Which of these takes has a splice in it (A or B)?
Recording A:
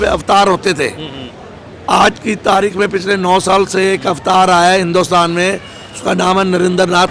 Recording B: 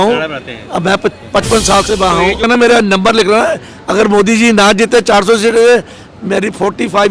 B